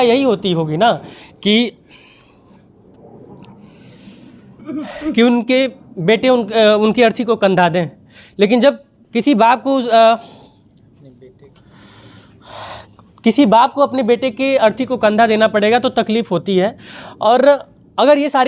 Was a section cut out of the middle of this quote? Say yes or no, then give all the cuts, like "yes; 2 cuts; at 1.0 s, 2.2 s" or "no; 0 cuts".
no; 0 cuts